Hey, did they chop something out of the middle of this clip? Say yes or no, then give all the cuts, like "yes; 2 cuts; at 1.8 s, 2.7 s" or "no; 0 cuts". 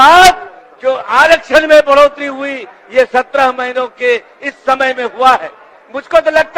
no; 0 cuts